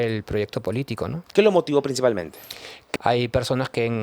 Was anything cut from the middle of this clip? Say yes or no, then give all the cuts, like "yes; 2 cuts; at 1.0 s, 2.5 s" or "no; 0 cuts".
yes; 1 cut; at 2.7 s